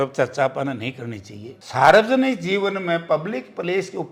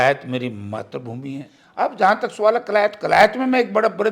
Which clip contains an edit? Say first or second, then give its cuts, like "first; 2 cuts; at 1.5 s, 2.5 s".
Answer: second; 1 cut; at 1.7 s